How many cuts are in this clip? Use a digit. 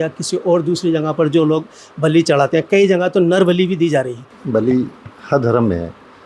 1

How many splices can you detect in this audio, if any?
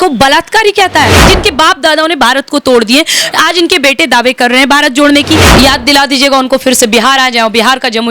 2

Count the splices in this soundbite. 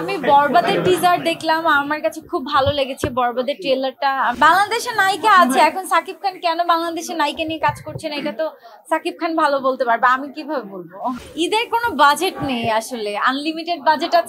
2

